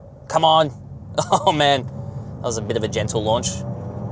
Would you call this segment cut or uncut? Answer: uncut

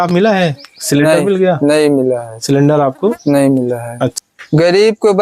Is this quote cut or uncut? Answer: cut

